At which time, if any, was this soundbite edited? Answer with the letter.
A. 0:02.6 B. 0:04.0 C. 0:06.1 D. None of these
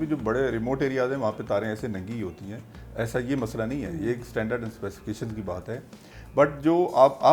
D